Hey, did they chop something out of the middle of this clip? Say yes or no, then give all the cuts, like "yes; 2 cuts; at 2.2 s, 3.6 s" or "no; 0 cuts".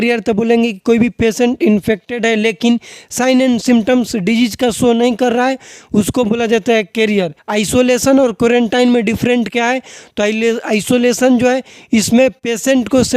yes; 1 cut; at 7.4 s